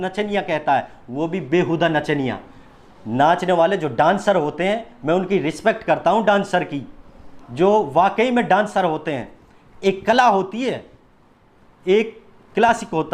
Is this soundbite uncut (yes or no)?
yes